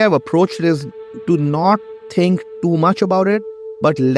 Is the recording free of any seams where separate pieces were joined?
yes; 0 cuts

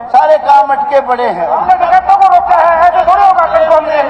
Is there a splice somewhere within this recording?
yes; 1 cut; at 1.5 s

